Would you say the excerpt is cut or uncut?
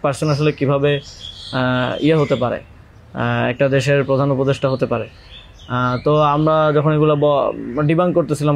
uncut